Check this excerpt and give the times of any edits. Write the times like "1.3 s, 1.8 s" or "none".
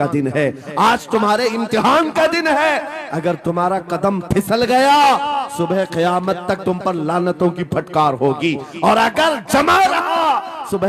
none